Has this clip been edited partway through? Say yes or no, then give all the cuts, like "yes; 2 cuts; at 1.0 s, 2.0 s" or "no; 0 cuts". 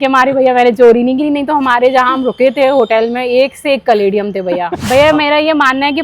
yes; 1 cut; at 4.8 s